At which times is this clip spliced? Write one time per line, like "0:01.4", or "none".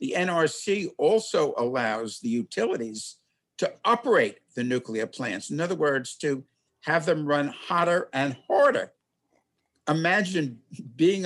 none